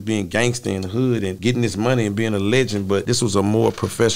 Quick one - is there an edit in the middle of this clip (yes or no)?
yes